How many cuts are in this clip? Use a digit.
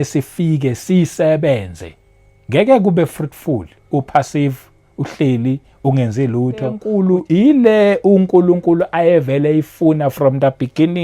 1